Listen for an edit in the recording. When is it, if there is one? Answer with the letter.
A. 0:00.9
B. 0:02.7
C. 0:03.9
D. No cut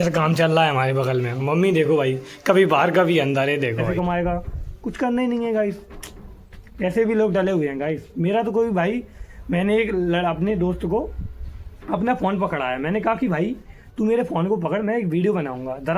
C